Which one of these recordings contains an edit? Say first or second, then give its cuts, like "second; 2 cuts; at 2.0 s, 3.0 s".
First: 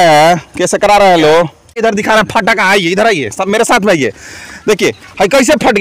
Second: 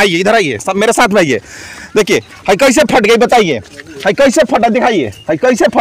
first; 1 cut; at 1.8 s